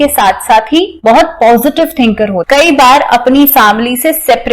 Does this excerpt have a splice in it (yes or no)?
yes